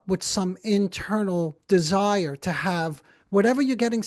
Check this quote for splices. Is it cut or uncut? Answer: uncut